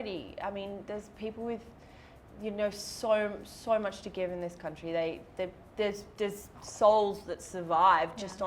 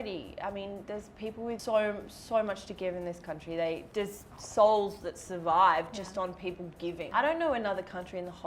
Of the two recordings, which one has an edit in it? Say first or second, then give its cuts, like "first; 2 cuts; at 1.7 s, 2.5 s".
second; 3 cuts; at 1.6 s, 3.9 s, 7.0 s